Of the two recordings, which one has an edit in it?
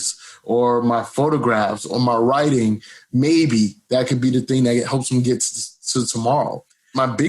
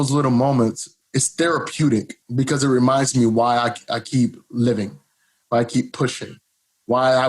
second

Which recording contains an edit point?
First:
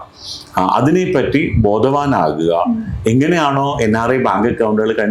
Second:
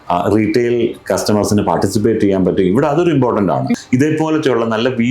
second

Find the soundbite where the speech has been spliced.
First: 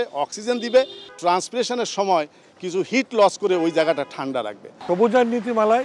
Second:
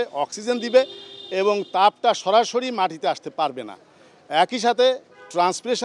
first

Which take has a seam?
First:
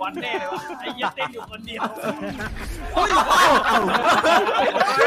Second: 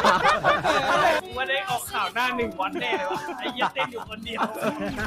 second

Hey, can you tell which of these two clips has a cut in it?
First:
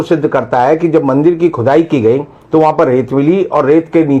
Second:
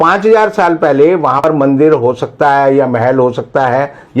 second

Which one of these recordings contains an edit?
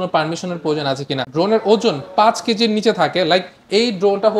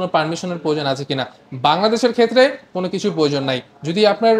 first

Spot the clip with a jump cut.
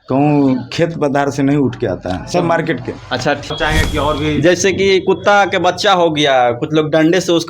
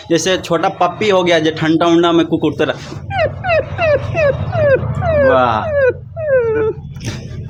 first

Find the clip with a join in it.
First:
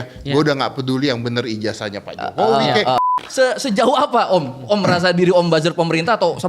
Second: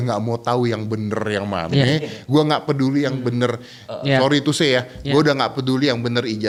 first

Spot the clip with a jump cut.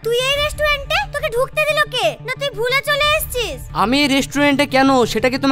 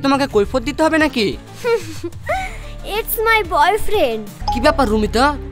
second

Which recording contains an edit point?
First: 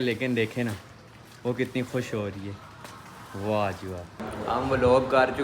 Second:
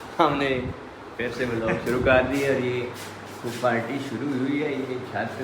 first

